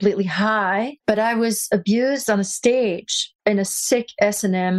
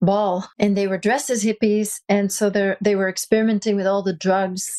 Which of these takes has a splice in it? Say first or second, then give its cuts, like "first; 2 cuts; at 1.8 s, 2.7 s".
first; 1 cut; at 0.9 s